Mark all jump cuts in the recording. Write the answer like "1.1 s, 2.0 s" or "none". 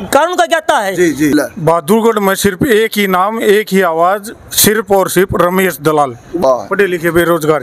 1.3 s, 6.4 s